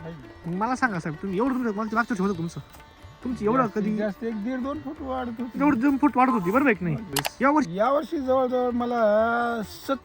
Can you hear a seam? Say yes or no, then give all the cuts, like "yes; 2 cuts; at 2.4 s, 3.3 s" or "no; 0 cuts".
yes; 1 cut; at 7.7 s